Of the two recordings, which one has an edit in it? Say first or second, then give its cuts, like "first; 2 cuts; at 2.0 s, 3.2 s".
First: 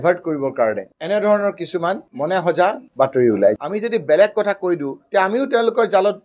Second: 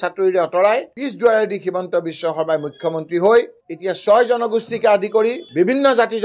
first; 1 cut; at 3.6 s